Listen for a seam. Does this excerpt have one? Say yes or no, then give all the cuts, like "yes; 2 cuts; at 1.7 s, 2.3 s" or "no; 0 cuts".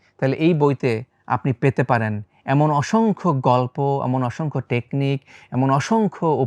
no; 0 cuts